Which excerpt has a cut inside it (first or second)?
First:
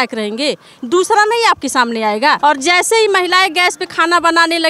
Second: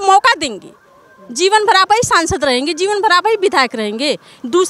first